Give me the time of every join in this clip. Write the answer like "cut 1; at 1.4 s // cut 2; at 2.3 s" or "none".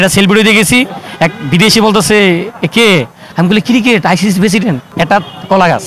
cut 1; at 3.2 s // cut 2; at 4.9 s